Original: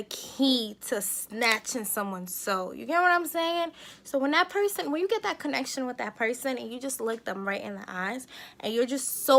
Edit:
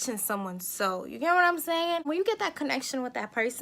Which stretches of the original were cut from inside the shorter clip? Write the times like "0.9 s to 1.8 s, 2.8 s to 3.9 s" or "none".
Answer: 3.7 s to 4.9 s

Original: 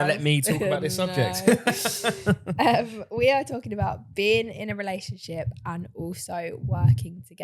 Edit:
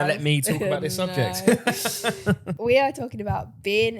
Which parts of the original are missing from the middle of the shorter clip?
2.5 s to 3.0 s

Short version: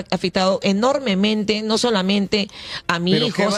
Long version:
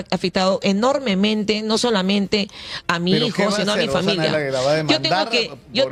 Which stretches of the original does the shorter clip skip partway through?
none

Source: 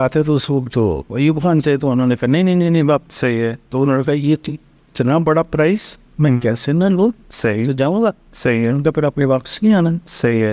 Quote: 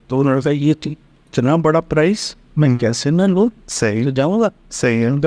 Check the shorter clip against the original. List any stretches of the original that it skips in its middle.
none

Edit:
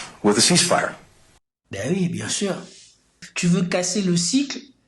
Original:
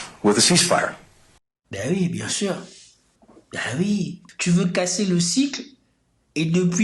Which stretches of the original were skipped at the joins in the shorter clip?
3.2 s to 4.2 s

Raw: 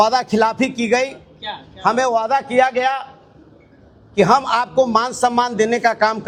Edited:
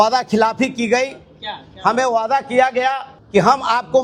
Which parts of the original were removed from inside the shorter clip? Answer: 3.1 s to 4.0 s

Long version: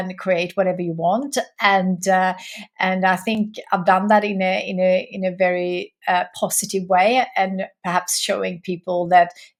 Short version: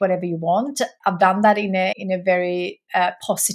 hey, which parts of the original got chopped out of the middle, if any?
1.5 s to 3.6 s, 4.6 s to 5.1 s

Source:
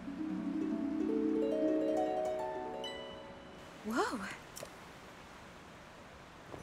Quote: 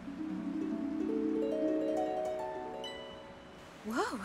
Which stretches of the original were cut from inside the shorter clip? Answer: none

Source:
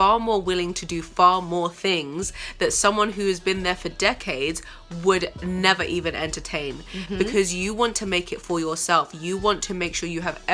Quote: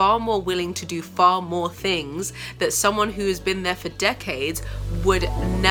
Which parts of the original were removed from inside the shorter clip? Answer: none

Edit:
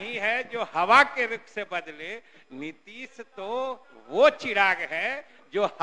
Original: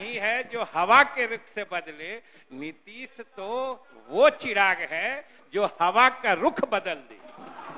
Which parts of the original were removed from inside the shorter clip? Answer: none

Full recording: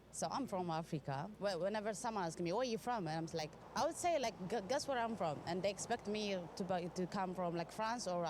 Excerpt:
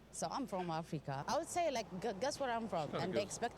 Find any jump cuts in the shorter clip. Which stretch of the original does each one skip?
1.2 s to 3.7 s

